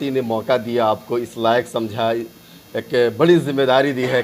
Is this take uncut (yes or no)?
yes